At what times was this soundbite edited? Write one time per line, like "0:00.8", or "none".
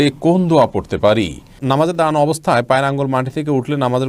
0:01.6